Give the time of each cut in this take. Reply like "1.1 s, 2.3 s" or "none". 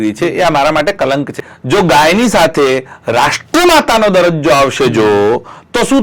1.4 s